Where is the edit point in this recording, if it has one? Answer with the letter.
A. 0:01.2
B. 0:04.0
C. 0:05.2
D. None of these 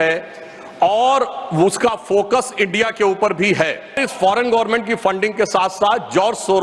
B